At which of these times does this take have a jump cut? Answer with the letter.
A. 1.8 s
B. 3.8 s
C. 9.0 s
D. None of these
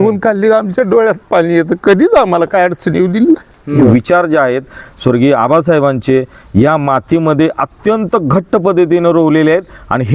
B